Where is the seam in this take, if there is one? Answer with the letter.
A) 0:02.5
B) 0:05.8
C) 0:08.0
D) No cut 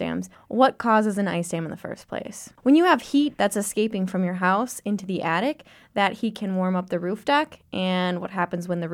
A